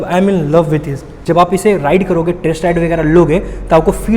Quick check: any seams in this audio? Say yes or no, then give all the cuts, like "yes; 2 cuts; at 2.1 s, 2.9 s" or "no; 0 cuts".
yes; 1 cut; at 1.2 s